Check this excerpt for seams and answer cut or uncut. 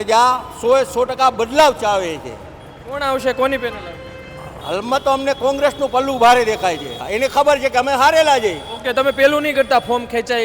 cut